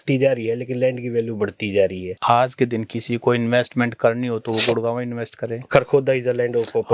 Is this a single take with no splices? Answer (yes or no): no